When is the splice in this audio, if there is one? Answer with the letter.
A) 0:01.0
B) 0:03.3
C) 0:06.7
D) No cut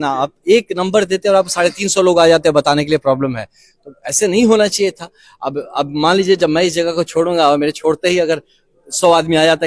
D